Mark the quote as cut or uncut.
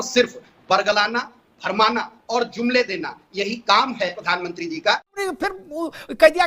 cut